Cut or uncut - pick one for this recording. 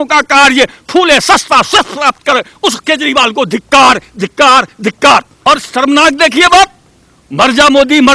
cut